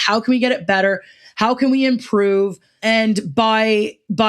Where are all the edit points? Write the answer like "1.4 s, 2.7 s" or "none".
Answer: 2.7 s